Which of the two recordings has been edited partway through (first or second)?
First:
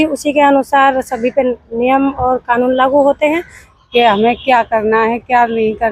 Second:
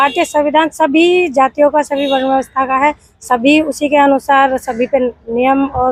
first